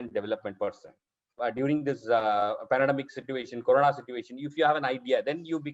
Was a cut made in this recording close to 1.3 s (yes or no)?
yes